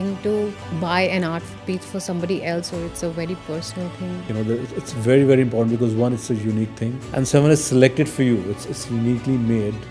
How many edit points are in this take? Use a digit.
2